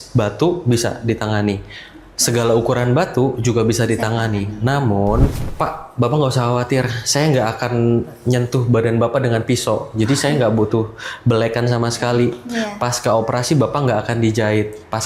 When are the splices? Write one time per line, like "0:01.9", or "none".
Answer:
0:05.4

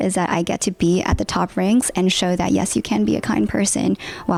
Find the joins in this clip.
none

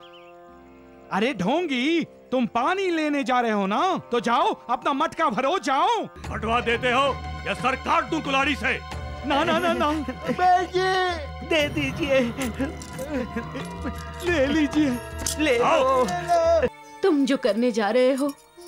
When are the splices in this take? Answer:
0:06.2
0:16.8

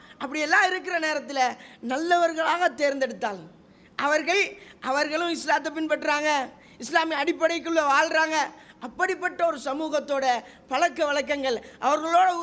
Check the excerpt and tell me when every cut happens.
none

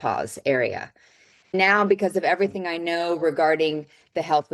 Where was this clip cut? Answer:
0:01.5

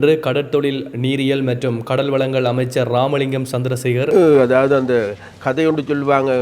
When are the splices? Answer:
0:04.1

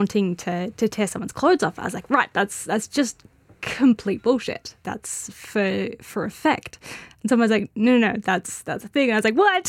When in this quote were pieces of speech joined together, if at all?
0:04.7

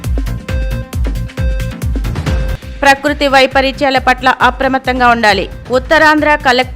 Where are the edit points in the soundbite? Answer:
0:02.3

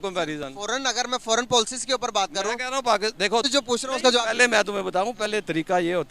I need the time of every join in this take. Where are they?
0:03.5

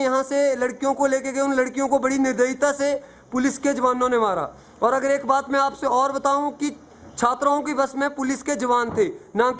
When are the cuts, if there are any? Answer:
none

